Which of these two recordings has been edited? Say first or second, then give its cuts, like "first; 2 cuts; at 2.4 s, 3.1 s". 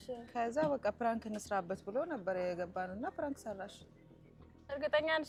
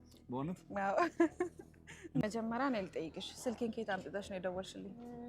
second; 1 cut; at 2.2 s